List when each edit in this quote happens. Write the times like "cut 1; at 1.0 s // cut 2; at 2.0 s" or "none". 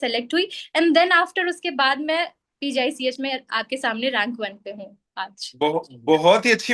none